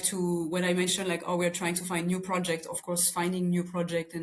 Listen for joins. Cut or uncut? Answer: uncut